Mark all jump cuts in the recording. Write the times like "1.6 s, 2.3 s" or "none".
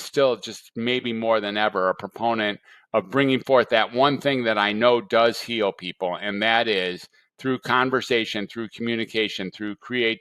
none